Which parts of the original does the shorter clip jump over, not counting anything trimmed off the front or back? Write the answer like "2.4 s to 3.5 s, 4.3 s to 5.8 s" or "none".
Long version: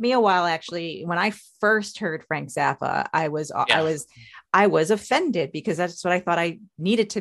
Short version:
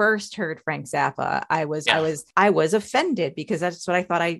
3.5 s to 4.0 s

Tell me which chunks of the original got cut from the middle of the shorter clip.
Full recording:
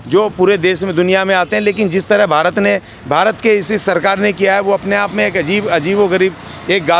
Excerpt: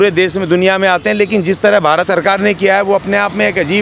2.5 s to 3.8 s

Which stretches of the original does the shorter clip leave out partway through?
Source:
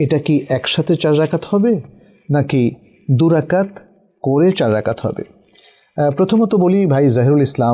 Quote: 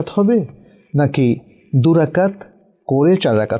none

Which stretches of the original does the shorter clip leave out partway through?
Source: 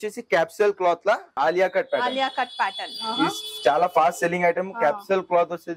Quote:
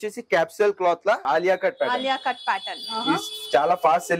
1.2 s to 1.3 s

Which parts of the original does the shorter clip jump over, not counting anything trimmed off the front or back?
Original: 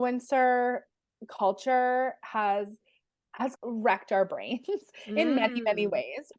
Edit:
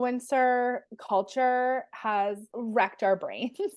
0.9 s to 1.2 s, 2.8 s to 3.6 s

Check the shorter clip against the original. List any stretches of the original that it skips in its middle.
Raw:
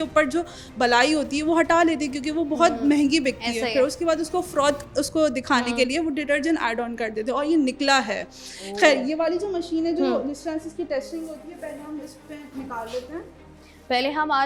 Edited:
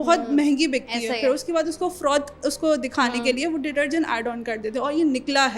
none

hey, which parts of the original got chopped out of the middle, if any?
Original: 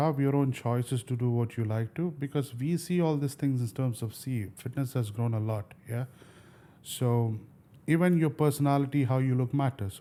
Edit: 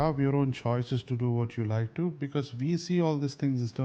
none

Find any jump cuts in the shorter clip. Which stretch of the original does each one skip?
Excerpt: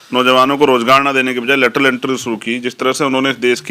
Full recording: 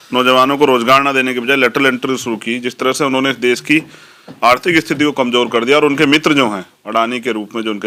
none

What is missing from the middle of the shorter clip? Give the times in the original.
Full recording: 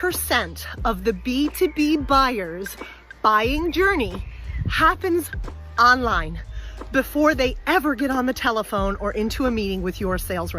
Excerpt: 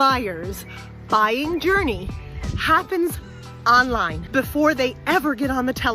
6.3 s to 6.8 s

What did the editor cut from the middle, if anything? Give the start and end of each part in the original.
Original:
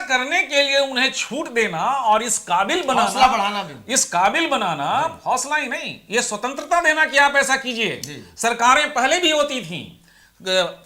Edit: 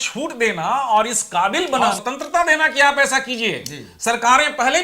3.1 s to 6.4 s

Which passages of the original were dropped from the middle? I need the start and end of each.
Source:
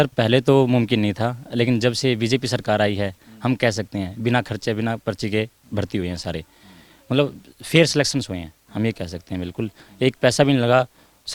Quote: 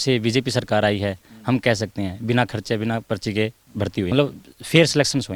6.1 s to 7.1 s

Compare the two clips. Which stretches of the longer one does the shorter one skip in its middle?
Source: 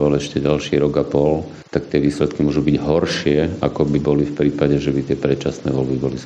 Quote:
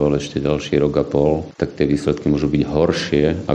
1.5 s to 1.6 s

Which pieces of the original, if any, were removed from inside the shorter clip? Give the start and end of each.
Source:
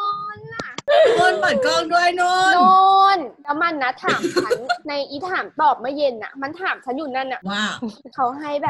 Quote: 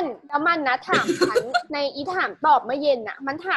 none

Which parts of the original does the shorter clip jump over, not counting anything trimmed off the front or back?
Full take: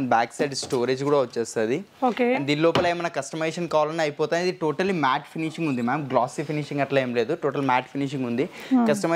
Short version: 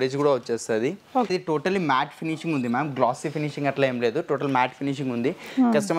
2.2 s to 4.4 s

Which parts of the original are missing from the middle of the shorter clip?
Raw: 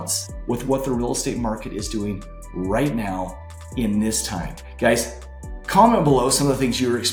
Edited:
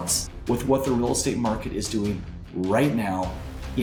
none

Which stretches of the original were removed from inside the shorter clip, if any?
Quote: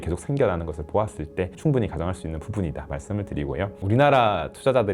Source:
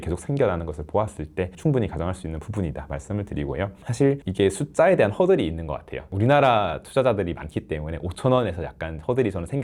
3.7 s to 6.0 s

